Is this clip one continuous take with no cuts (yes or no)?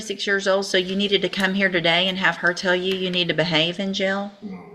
yes